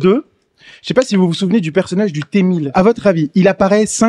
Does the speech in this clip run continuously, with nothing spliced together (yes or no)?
no